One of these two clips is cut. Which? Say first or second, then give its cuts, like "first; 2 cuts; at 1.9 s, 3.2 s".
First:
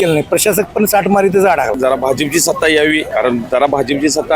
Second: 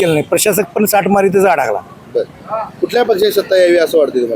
first; 2 cuts; at 1.8 s, 3.0 s